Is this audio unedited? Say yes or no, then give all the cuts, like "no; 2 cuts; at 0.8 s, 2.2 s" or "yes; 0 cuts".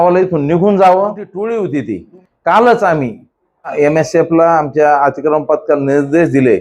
no; 2 cuts; at 1.3 s, 3.7 s